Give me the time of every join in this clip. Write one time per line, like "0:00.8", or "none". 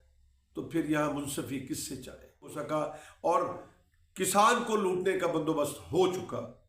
0:02.6